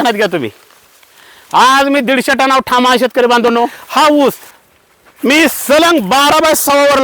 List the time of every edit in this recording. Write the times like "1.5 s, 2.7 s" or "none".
3.8 s

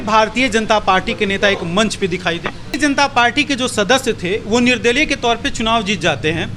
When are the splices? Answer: 2.8 s

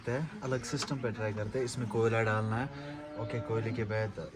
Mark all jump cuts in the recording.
none

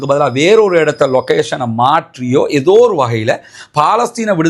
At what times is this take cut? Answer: none

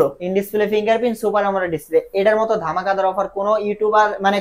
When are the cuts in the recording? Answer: none

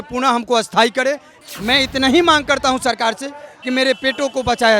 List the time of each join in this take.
1.3 s

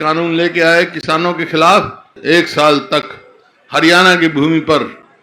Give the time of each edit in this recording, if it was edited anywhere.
2.1 s

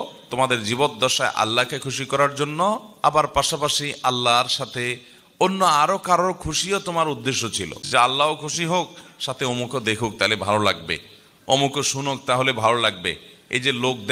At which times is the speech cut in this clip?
7.7 s

